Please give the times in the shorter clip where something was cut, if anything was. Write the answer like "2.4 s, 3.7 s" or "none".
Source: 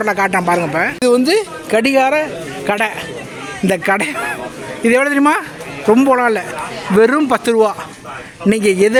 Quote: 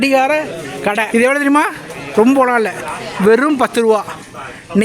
1.1 s